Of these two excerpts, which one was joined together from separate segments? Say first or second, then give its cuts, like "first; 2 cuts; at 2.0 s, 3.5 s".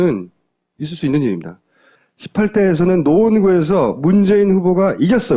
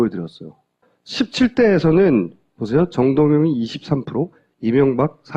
first; 1 cut; at 3.3 s